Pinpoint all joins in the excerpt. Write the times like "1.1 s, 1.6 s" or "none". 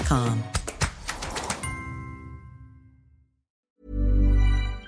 3.6 s